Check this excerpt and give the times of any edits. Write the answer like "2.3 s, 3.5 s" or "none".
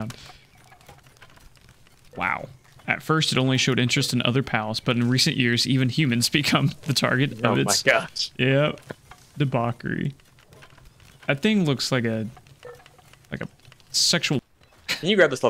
14.4 s